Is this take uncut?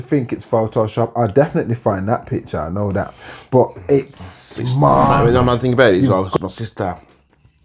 no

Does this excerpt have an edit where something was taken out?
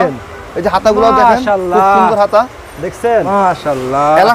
yes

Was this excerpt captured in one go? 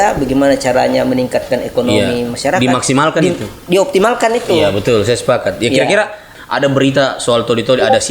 no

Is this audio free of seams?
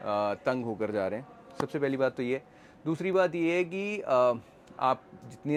yes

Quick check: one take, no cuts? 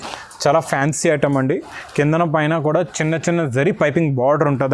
yes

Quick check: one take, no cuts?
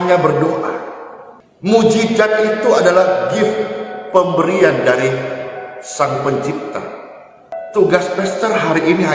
yes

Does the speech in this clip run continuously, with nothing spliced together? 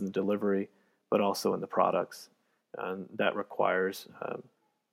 yes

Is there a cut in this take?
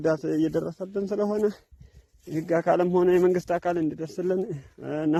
no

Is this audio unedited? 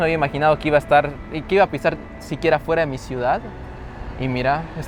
yes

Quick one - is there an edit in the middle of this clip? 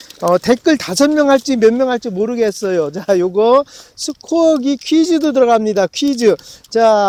no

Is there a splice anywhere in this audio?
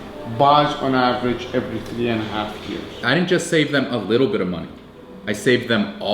yes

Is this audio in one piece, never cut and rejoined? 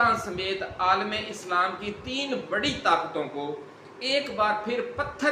yes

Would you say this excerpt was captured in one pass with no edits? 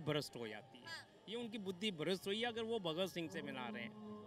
yes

